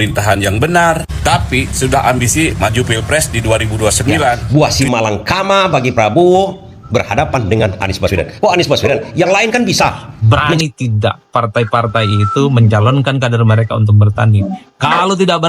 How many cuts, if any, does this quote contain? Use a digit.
2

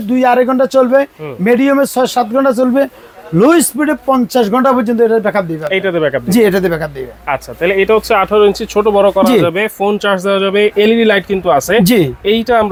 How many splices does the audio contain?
0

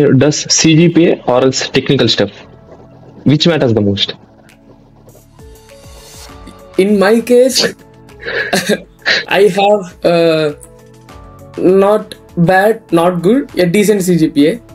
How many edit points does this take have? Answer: 0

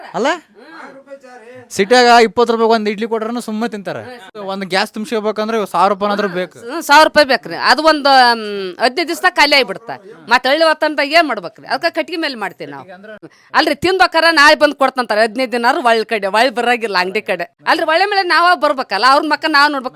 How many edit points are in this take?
3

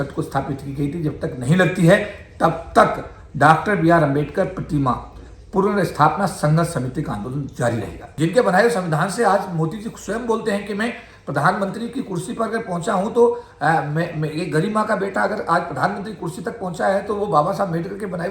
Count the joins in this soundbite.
1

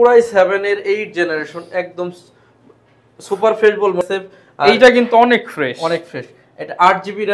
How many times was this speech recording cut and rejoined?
1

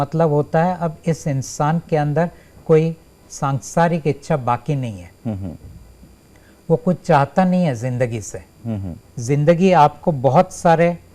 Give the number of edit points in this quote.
1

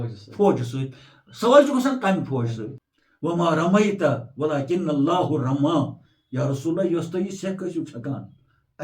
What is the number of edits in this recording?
1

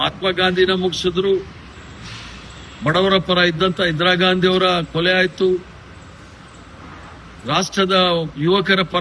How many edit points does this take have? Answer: 0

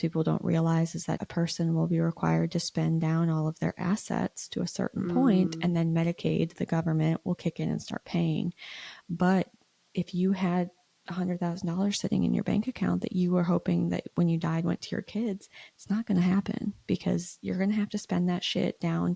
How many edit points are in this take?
1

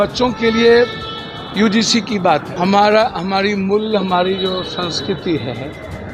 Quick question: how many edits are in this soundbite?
1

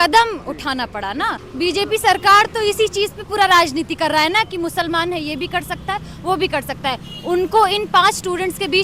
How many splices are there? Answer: 1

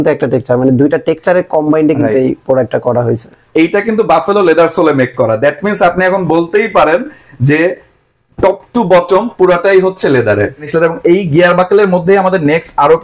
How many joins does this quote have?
2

